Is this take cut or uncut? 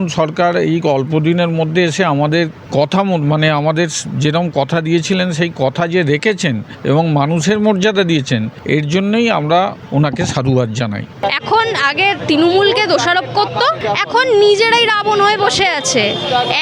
cut